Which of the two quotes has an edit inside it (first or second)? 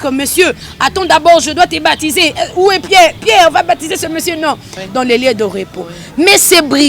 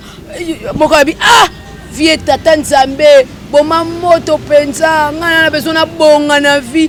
first